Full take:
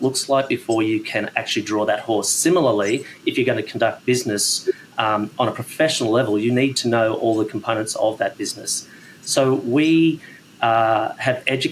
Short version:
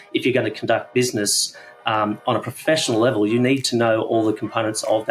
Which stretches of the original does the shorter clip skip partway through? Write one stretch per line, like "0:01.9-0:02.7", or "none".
none